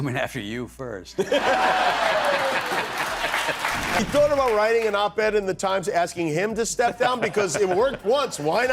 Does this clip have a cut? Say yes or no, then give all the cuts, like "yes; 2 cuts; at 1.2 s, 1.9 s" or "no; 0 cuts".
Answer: no; 0 cuts